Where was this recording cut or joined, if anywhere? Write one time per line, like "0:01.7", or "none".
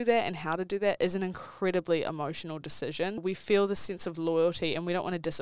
0:03.2